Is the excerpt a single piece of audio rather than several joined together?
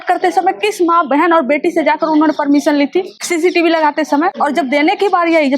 no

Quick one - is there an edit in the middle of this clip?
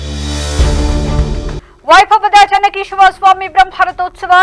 yes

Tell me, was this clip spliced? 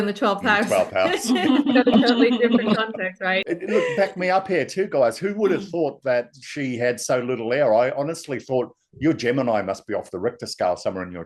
yes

